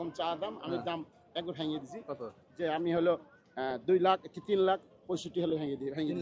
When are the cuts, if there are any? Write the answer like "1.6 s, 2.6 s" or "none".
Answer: none